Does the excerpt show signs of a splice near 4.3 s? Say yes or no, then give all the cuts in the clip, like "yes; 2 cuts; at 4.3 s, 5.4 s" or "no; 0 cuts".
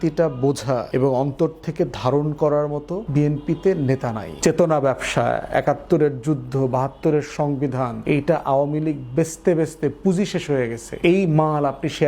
yes; 5 cuts; at 0.8 s, 3.0 s, 4.3 s, 8.0 s, 10.8 s